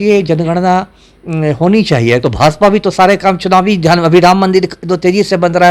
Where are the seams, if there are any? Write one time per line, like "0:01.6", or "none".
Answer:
0:02.2